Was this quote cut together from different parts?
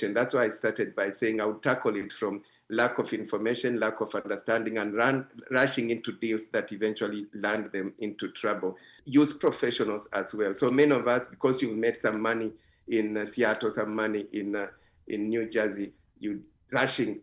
yes; 1 cut; at 9.0 s

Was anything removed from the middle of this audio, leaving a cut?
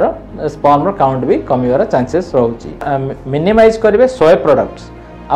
yes; 1 cut; at 2.9 s

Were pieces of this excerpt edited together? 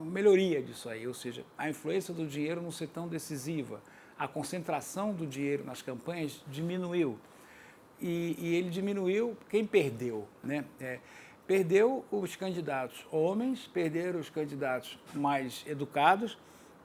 no; 0 cuts

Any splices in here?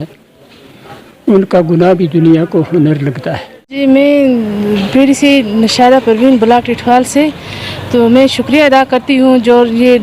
yes; 1 cut; at 3.8 s

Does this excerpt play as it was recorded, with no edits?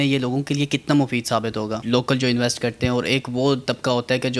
no; 1 cut; at 1.8 s

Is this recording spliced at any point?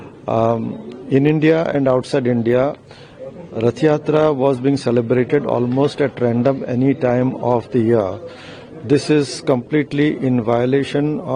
no; 0 cuts

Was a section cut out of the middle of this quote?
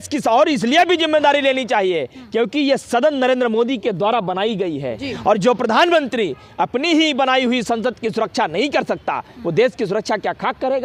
no; 0 cuts

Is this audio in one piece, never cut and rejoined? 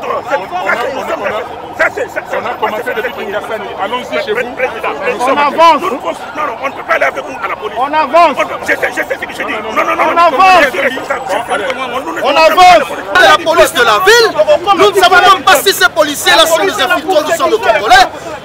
no; 1 cut; at 13.2 s

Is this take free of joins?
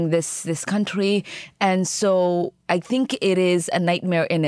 yes; 0 cuts

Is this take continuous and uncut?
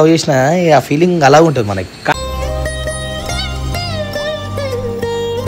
yes; 0 cuts

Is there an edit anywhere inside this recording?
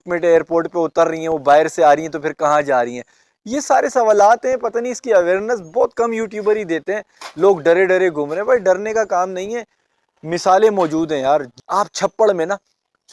yes; 1 cut; at 11.5 s

